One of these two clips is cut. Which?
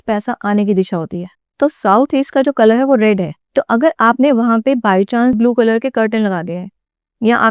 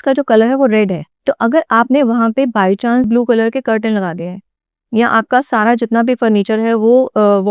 first; 1 cut; at 1.4 s

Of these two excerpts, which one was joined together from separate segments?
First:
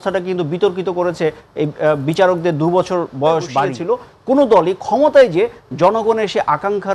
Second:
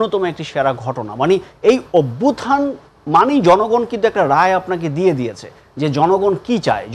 first; 1 cut; at 3.8 s

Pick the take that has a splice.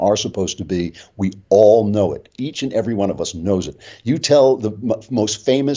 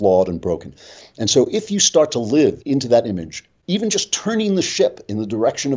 second; 1 cut; at 2.6 s

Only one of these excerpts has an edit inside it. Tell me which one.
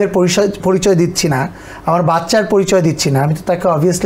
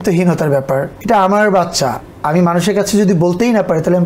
second; 1 cut; at 0.9 s

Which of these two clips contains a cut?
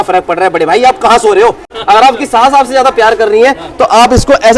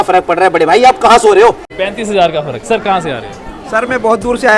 first; 1 cut; at 1.7 s

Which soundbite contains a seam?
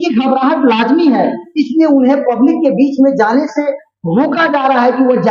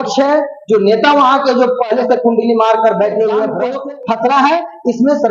second; 1 cut; at 3.7 s

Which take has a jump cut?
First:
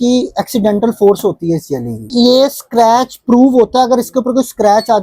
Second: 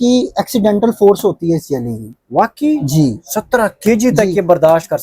first; 1 cut; at 2.1 s

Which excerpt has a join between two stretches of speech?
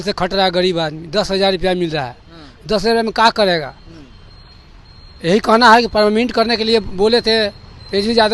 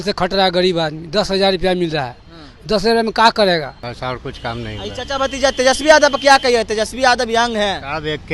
second; 1 cut; at 3.8 s

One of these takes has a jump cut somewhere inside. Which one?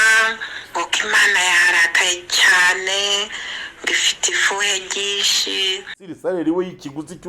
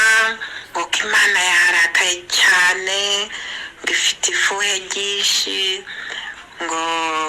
first; 1 cut; at 6.1 s

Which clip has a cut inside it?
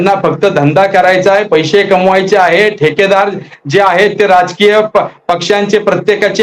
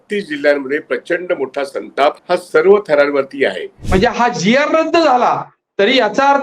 second; 2 cuts; at 2.2 s, 3.8 s

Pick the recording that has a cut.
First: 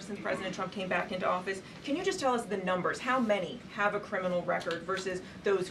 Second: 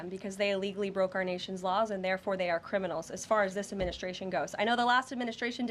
second; 1 cut; at 0.9 s

